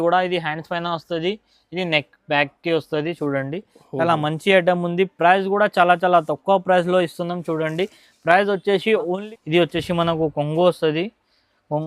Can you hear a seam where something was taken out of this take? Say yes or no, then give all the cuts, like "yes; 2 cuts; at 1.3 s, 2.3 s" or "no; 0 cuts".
yes; 1 cut; at 9.2 s